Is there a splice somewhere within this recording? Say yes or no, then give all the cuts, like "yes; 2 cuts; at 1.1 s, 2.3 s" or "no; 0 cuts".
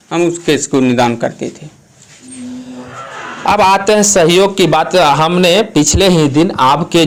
no; 0 cuts